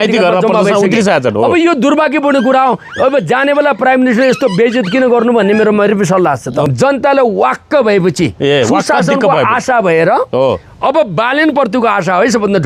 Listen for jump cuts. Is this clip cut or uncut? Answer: cut